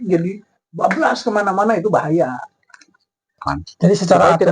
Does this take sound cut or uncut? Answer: cut